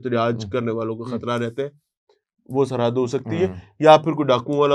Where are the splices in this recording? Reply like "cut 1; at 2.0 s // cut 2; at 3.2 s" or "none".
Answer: none